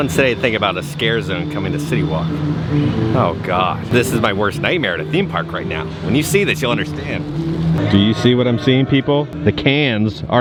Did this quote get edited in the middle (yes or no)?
no